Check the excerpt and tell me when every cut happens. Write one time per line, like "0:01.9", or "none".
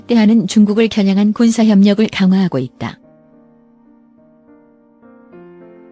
0:03.0